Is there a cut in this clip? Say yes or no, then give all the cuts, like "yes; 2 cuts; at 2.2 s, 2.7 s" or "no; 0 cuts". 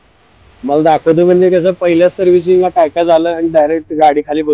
no; 0 cuts